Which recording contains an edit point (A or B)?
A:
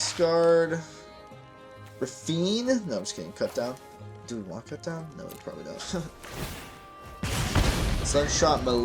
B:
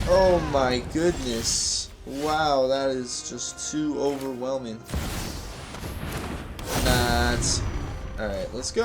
A